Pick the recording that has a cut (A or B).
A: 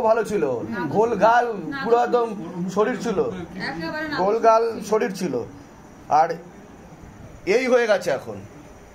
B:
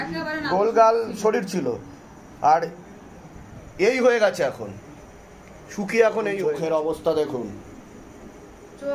B